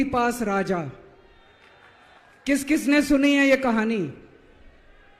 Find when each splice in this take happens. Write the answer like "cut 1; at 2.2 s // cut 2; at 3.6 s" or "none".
cut 1; at 2.2 s